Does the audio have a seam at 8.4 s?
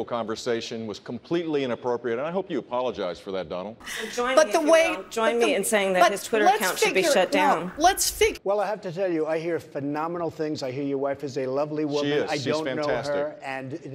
yes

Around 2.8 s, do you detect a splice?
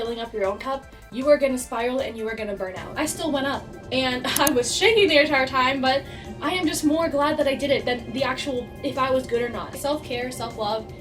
yes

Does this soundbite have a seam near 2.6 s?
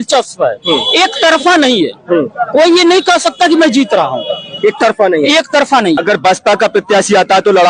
no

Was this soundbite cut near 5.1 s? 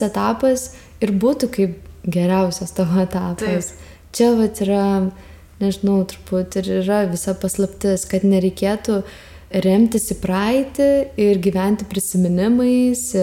no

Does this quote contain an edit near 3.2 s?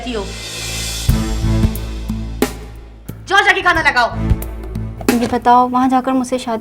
no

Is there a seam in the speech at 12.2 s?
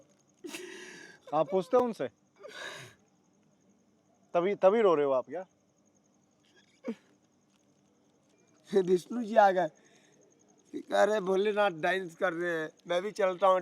no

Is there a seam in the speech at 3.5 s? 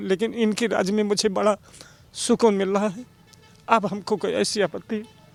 no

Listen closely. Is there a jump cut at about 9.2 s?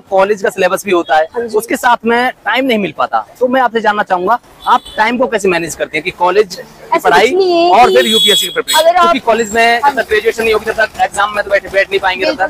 yes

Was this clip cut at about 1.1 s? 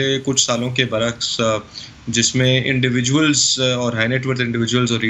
no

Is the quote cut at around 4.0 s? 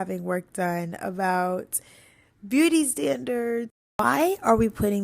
yes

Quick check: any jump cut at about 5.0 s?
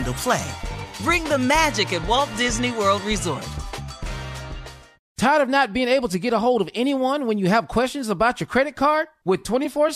yes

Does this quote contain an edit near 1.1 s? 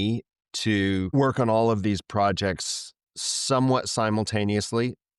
yes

